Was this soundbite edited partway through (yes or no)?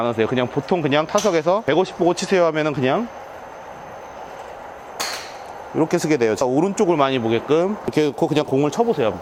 no